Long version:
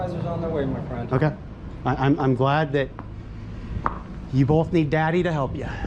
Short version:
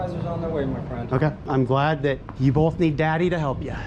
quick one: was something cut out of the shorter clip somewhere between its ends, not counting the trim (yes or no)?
yes